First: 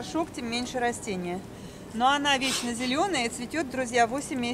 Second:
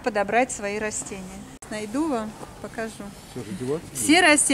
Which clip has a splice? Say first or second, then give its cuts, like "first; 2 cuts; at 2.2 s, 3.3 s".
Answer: second; 1 cut; at 1.6 s